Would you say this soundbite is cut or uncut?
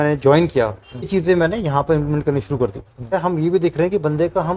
cut